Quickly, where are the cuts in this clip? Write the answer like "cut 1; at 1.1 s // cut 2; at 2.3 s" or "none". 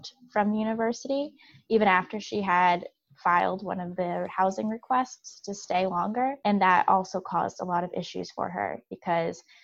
cut 1; at 6.4 s

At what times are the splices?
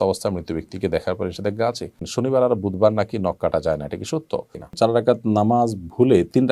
cut 1; at 2.0 s // cut 2; at 4.7 s

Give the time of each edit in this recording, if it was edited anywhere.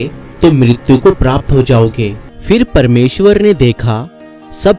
cut 1; at 2.3 s

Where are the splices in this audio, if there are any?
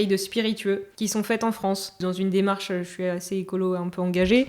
cut 1; at 0.9 s // cut 2; at 1.9 s

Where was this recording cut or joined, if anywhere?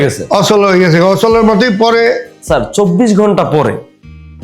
cut 1; at 2.3 s

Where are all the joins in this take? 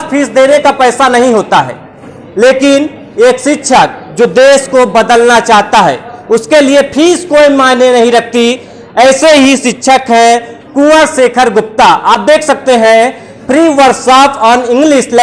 none

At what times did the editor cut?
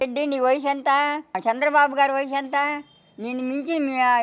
cut 1; at 1.4 s

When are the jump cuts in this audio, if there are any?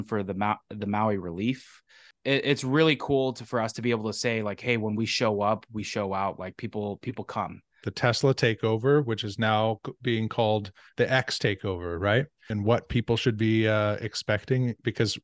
cut 1; at 2.1 s // cut 2; at 7.9 s // cut 3; at 12.4 s

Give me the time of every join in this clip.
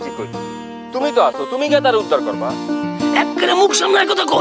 cut 1; at 2.2 s // cut 2; at 3.4 s

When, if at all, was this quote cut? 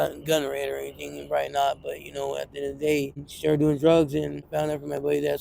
cut 1; at 3.3 s // cut 2; at 4.5 s

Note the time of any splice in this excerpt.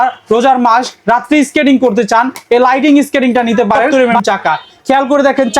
cut 1; at 3.9 s

